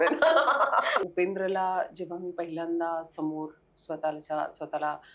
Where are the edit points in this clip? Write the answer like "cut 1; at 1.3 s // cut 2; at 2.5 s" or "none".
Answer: cut 1; at 1.0 s